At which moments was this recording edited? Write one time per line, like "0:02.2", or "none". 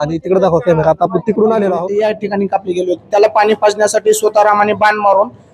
0:01.9

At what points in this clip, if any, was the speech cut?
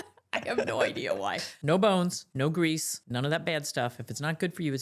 0:01.5
0:02.2
0:03.0

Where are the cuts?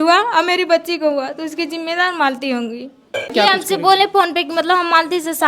0:03.3

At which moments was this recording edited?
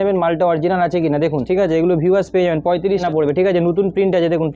0:01.4
0:03.0

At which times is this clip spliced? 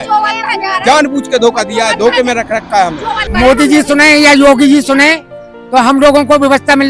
0:03.2

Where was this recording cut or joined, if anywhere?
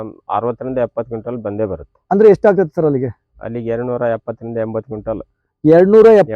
none

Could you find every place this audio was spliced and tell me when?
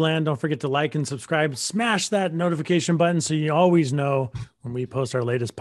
none

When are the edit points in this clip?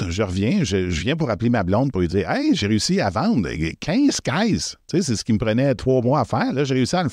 none

